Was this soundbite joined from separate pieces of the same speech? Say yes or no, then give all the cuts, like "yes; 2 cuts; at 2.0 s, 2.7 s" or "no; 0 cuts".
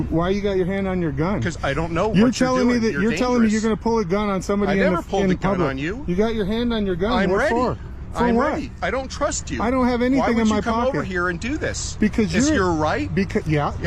no; 0 cuts